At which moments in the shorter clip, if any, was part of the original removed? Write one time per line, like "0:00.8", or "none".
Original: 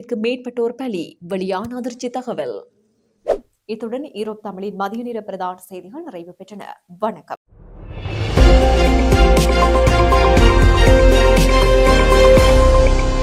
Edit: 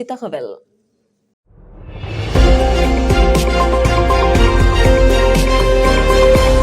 0:01.2